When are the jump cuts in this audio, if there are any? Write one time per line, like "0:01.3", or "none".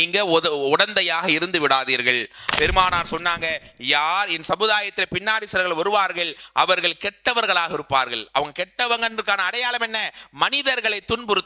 0:02.4